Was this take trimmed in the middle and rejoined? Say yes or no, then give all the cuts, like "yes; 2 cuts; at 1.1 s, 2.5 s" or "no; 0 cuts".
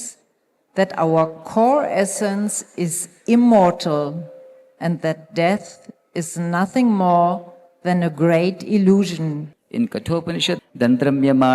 yes; 2 cuts; at 9.5 s, 10.6 s